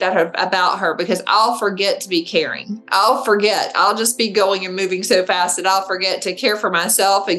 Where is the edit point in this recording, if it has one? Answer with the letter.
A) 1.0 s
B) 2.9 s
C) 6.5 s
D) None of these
D